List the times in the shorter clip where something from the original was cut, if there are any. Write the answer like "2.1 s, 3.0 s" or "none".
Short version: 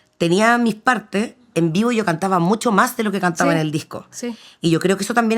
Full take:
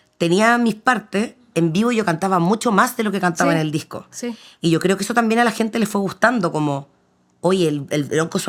none